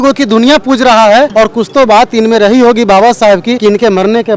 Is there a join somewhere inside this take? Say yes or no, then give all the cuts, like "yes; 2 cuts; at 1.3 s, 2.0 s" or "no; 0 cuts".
yes; 2 cuts; at 1.3 s, 3.6 s